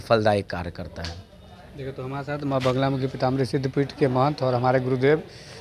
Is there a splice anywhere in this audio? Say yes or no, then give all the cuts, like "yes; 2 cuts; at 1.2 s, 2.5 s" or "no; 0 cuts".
no; 0 cuts